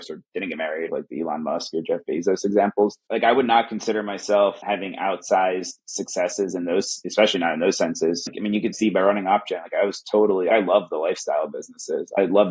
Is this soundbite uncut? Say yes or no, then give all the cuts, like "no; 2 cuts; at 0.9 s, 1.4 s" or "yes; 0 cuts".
no; 5 cuts; at 0.9 s, 3.0 s, 7.0 s, 8.2 s, 10.5 s